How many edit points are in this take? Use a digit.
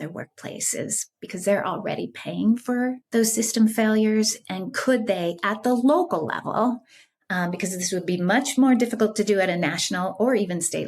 1